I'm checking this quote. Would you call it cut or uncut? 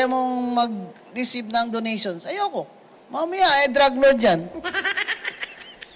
uncut